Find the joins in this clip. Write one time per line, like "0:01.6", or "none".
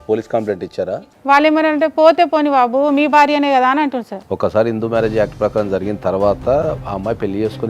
0:00.9
0:04.2